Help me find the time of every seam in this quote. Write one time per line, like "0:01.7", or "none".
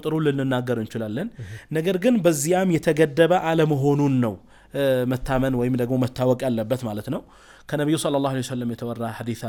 none